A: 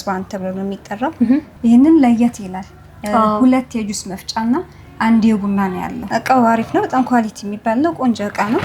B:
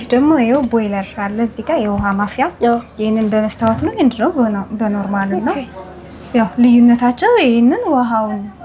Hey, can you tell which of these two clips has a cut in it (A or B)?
A